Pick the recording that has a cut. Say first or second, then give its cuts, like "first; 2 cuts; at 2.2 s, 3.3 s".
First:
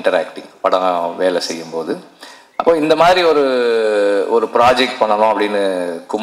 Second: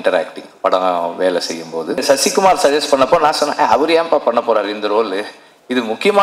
second; 1 cut; at 2.0 s